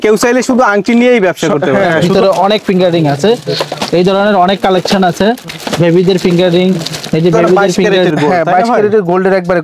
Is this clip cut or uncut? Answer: cut